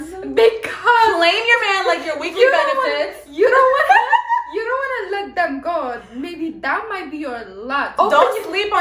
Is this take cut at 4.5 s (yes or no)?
no